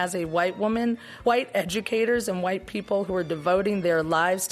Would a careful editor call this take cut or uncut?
cut